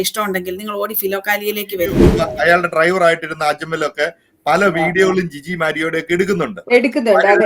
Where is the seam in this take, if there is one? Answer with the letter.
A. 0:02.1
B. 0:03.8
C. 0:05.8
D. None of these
A